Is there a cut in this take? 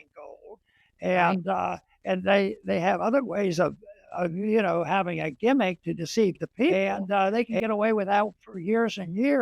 yes; 1 cut; at 6.7 s

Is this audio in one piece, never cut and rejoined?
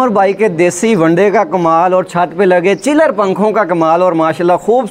yes; 0 cuts

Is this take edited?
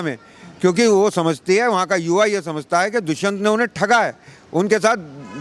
no; 0 cuts

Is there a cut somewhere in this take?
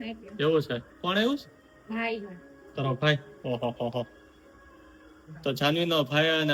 no; 0 cuts

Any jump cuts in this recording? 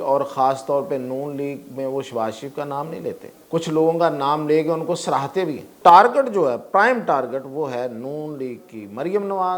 yes; 2 cuts; at 3.3 s, 5.7 s

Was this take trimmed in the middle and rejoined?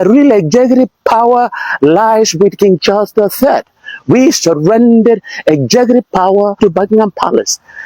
yes; 1 cut; at 6.6 s

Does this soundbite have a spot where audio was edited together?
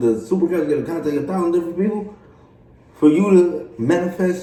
no; 0 cuts

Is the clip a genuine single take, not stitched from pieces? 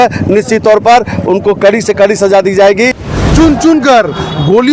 no; 1 cut; at 3.0 s

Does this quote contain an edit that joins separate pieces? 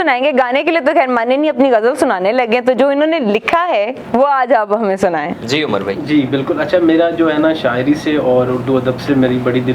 no; 0 cuts

